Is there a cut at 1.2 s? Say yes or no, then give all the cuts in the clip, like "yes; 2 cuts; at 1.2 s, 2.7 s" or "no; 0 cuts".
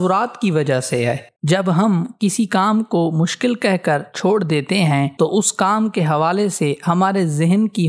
no; 0 cuts